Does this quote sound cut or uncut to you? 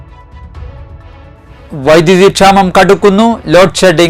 cut